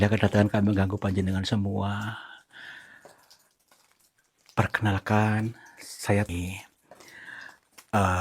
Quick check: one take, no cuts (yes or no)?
no